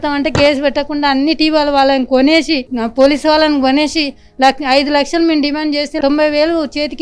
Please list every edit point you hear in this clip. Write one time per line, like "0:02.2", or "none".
none